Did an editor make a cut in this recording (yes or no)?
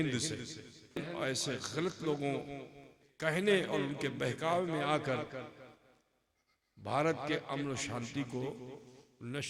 yes